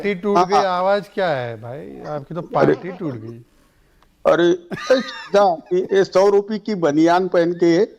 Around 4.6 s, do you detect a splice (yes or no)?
no